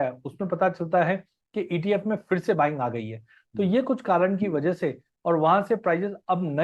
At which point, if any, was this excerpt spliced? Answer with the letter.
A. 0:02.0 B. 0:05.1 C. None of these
B